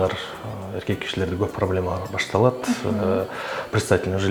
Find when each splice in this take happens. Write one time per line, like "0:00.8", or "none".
none

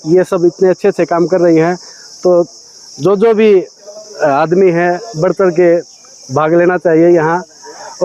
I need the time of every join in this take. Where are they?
none

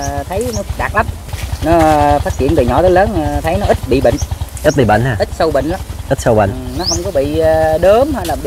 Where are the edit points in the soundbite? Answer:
0:01.2

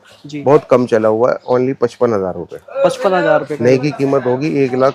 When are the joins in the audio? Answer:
none

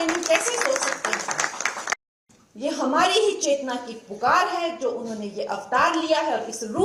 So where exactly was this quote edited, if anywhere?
0:02.0

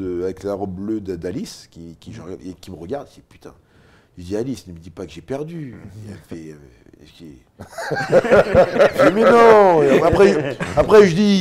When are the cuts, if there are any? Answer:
none

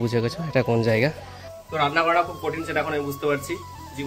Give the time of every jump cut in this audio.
0:01.5

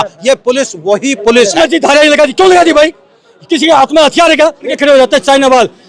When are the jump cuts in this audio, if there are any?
0:01.6
0:04.7

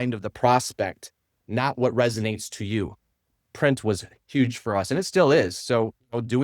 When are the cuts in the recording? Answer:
0:03.2

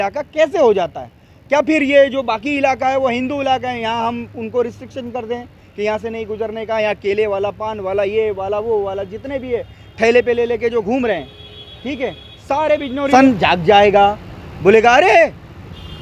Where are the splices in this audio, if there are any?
0:13.1

